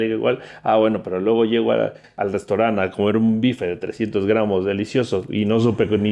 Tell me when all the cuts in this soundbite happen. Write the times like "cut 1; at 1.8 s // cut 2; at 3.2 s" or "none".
cut 1; at 2.1 s